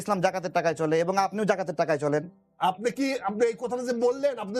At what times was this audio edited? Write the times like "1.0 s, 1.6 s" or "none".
2.4 s